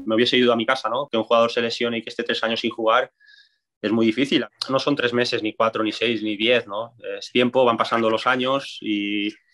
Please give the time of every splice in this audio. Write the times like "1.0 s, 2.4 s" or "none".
1.1 s, 4.4 s